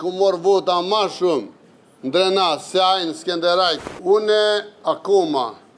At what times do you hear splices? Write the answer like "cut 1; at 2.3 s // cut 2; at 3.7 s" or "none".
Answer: cut 1; at 3.9 s